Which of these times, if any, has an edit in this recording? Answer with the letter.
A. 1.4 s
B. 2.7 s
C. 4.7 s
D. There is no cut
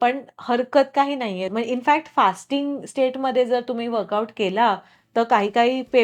A